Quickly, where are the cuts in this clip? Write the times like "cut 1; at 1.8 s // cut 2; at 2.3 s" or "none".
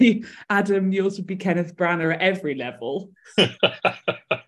none